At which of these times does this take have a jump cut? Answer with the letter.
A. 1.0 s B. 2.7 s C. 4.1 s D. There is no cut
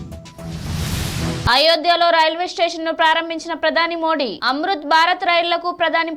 A